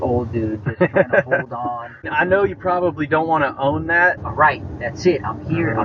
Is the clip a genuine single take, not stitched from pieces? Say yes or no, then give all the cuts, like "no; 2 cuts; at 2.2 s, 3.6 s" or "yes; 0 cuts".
no; 2 cuts; at 2.1 s, 4.2 s